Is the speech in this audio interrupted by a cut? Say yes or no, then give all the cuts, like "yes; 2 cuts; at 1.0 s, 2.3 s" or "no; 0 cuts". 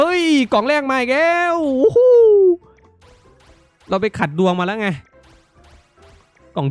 no; 0 cuts